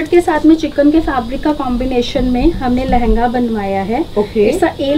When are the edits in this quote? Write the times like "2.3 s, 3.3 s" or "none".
none